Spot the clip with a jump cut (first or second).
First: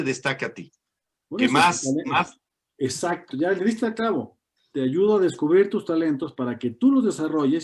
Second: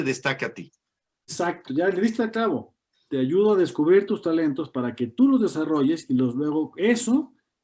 second